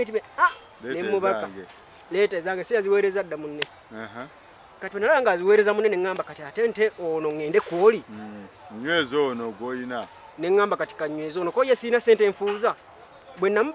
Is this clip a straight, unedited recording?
yes; 0 cuts

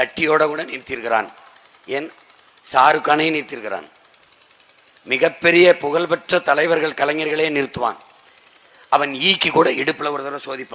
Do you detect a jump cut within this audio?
no; 0 cuts

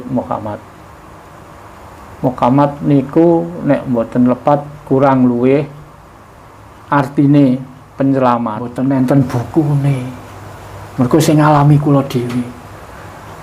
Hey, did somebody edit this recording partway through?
yes; 1 cut; at 8.7 s

